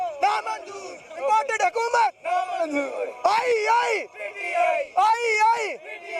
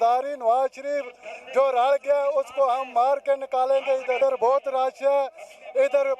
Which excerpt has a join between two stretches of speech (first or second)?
second